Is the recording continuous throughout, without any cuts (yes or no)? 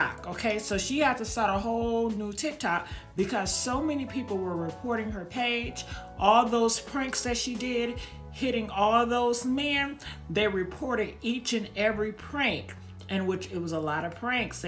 yes